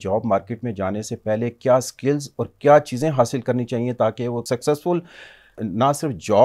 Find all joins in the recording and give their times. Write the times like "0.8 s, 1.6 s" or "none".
4.4 s, 5.5 s

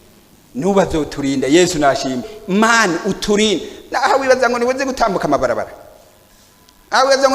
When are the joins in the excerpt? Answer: 2.4 s

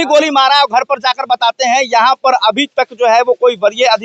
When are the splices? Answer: none

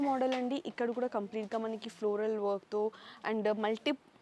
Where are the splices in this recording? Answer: none

